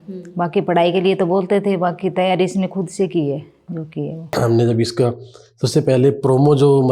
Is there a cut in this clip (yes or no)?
yes